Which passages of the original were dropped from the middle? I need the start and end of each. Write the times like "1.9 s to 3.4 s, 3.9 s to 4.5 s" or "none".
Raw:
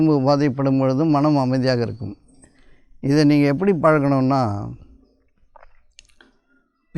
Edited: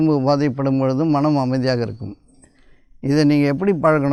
none

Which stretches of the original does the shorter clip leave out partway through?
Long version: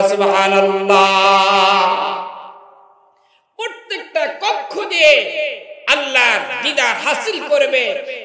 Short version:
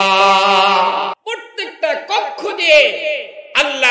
2.2 s to 3.5 s

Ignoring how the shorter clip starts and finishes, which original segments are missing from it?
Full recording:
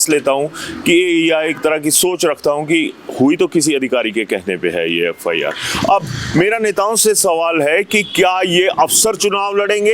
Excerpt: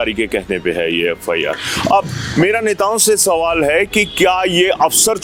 none

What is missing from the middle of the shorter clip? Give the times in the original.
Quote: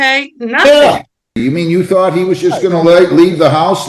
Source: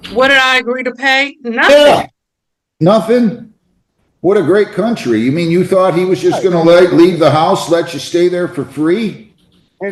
2.4 s to 5.2 s

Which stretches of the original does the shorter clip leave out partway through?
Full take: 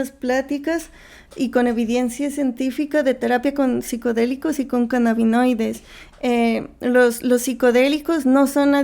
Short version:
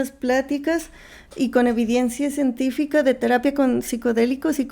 none

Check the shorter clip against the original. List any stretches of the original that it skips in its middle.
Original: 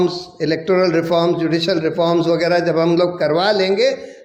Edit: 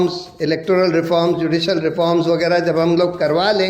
none

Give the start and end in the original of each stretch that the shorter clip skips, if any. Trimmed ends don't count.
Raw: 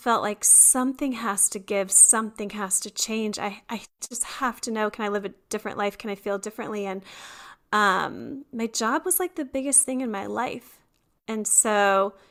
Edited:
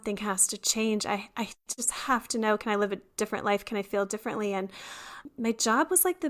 7.5 s to 8.4 s

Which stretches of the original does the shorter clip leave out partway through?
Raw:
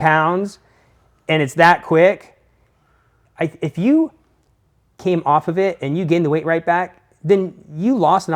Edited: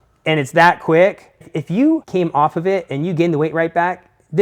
2.5 s to 3.6 s, 4.1 s to 5.0 s

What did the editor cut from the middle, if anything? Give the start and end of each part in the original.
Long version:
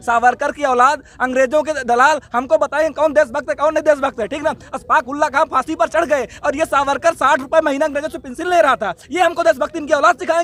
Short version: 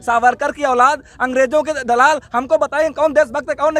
none

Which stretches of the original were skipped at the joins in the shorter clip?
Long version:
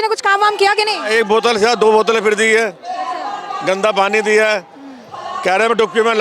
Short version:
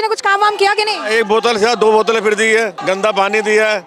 2.8 s to 3.6 s

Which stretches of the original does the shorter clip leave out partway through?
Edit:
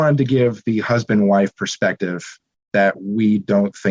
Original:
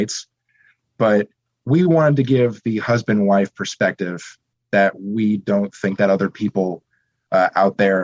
none

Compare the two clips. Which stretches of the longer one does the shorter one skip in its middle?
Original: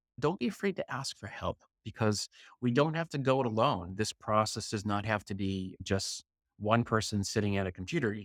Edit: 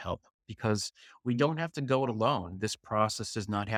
none

